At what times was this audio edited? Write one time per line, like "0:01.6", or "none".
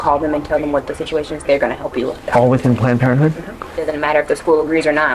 0:03.9